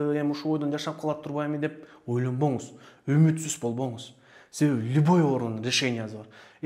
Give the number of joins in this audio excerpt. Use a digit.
0